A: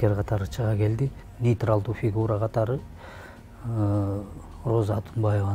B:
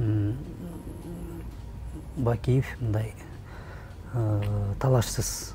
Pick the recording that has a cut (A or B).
A